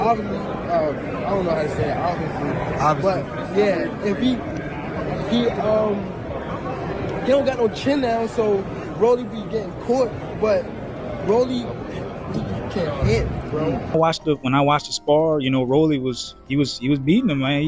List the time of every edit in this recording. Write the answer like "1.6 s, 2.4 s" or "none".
13.9 s